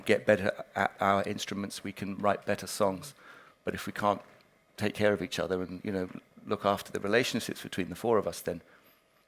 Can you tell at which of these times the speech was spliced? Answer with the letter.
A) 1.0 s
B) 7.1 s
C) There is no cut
C